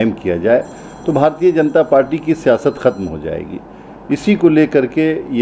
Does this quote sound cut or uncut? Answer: uncut